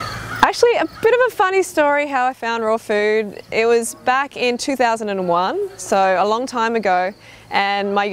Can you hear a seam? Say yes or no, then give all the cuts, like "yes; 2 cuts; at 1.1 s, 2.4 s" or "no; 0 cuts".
yes; 1 cut; at 1.7 s